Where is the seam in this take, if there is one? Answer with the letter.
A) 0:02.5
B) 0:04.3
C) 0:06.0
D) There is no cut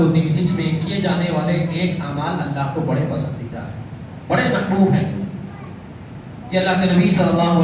D